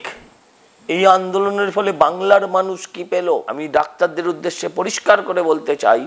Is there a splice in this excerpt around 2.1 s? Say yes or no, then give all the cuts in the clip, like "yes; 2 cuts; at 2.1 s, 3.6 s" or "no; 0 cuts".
no; 1 cut; at 3.5 s